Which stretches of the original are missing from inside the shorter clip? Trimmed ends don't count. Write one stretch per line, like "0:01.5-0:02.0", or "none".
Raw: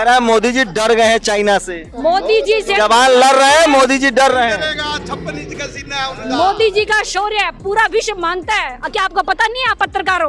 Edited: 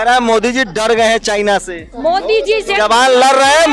none

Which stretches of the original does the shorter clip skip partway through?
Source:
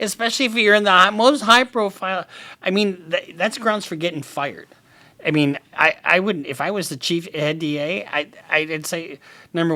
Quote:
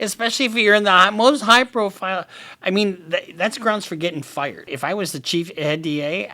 0:04.7-0:06.5

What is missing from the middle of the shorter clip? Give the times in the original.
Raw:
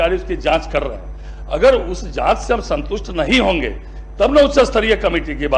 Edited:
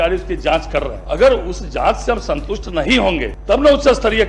0:01.0-0:01.4
0:03.8-0:04.0

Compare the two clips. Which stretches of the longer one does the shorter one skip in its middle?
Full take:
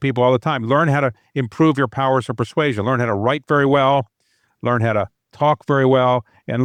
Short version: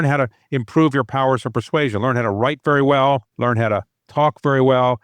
0:04.1-0:04.5

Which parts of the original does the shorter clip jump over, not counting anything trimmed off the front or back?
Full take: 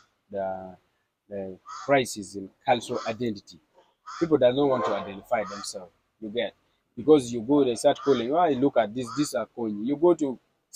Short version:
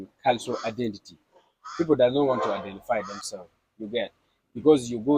none

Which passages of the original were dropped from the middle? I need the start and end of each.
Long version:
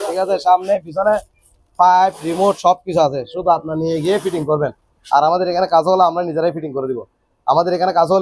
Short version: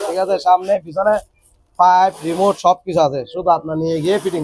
none

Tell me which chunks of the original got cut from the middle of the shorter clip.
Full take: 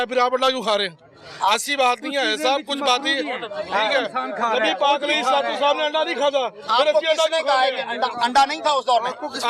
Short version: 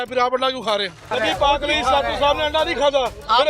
0:01.1-0:04.5

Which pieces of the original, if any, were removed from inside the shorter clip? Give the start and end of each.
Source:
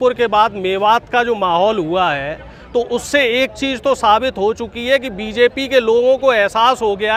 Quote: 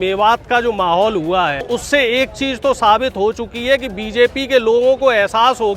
0:02.3-0:02.9

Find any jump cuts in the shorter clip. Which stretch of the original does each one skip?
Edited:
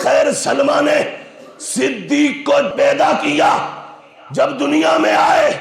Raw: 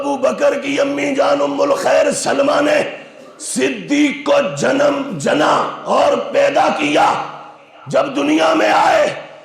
0:04.5-0:06.3

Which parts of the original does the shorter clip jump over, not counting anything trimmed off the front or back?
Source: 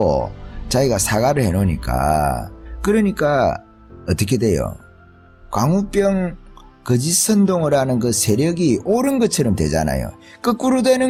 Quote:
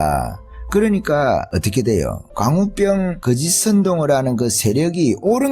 0:03.6-0:04.0
0:04.8-0:05.4
0:06.3-0:06.8

